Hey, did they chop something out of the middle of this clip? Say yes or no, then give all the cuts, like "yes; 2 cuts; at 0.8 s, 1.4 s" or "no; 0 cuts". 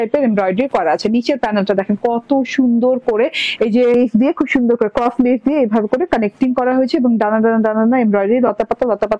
yes; 2 cuts; at 1.0 s, 3.9 s